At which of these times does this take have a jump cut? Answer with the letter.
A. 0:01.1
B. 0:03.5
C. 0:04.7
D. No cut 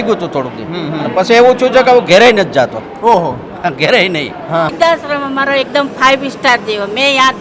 C